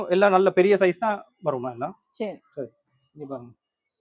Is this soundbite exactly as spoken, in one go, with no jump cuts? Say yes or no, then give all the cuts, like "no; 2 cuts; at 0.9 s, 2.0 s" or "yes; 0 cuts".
yes; 0 cuts